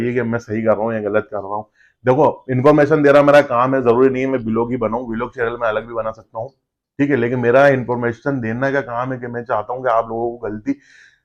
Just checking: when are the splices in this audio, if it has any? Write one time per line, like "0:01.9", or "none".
none